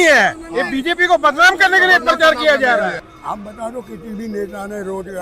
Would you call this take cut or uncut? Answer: cut